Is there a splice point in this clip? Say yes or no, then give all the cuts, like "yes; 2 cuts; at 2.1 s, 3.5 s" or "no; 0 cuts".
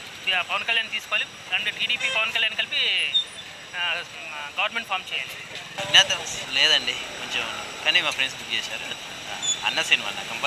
no; 0 cuts